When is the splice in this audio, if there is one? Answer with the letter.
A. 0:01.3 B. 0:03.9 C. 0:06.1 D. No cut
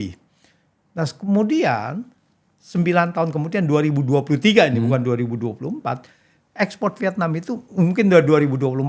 D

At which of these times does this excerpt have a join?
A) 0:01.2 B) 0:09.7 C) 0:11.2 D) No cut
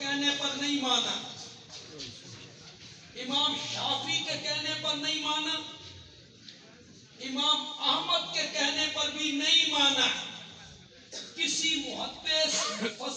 D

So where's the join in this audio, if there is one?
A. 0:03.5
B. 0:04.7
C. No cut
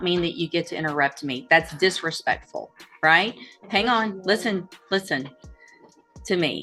C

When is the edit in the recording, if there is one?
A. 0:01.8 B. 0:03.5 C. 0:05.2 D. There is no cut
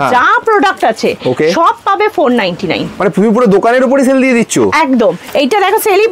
C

